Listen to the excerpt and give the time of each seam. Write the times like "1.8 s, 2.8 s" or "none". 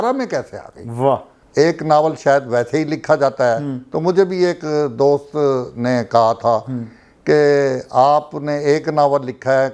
1.4 s